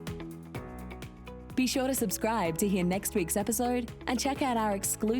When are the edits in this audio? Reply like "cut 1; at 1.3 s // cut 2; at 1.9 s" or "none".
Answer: cut 1; at 1.4 s